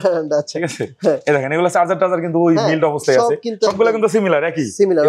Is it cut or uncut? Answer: uncut